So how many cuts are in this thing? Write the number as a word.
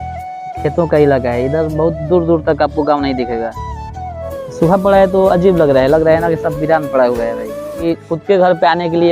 two